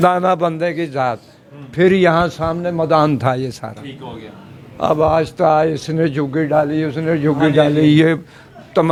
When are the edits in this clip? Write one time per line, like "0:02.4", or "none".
none

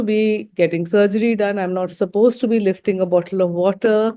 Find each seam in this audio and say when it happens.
none

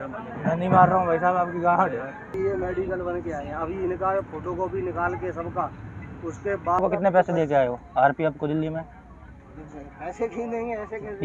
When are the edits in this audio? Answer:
0:02.3
0:06.8

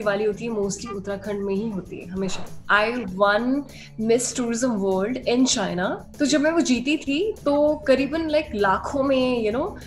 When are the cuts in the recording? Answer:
0:02.5
0:06.0

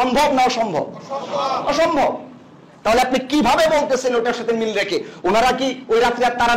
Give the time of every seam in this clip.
none

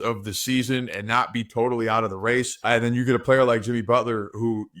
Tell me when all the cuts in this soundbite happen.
0:02.7

